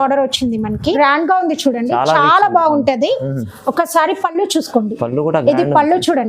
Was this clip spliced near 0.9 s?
yes; 1 cut; at 0.9 s

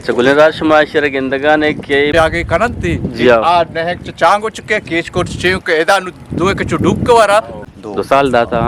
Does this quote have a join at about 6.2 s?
no; 2 cuts; at 2.1 s, 7.7 s

